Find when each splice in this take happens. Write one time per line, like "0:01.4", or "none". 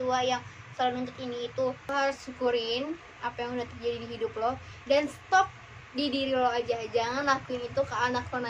0:01.8